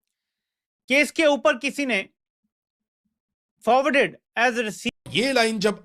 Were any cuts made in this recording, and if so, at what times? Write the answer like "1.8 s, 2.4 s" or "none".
4.8 s

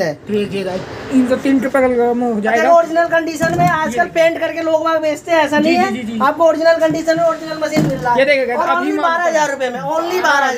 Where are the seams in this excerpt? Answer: none

